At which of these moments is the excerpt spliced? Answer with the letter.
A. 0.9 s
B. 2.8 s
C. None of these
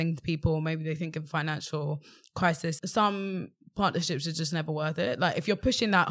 B